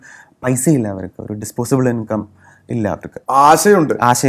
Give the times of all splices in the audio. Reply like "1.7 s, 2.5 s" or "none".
3.1 s